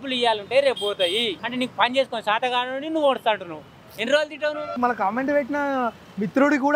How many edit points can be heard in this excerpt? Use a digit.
2